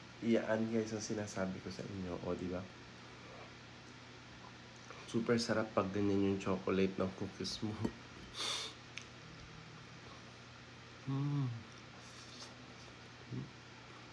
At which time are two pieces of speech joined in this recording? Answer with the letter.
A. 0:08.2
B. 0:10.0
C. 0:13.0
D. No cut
D